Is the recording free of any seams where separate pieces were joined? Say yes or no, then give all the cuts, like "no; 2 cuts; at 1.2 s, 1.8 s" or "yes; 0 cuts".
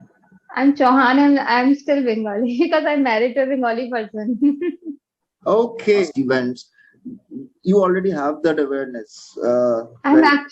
no; 1 cut; at 6.1 s